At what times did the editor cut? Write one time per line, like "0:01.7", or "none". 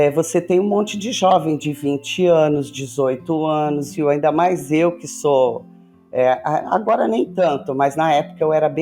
0:03.9